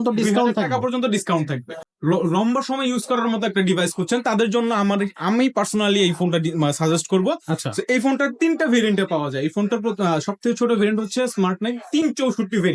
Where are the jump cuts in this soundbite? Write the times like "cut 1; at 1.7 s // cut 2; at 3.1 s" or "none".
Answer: cut 1; at 1.7 s